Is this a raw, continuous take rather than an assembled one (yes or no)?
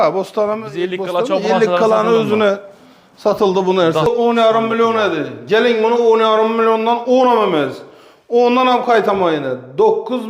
no